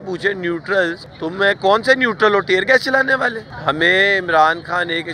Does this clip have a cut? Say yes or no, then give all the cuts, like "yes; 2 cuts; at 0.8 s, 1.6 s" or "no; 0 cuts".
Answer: yes; 2 cuts; at 1.1 s, 3.5 s